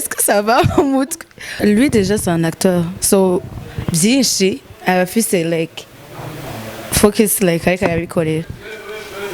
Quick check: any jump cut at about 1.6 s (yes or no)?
yes